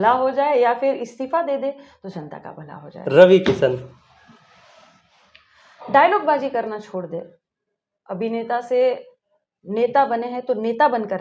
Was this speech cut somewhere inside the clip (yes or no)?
no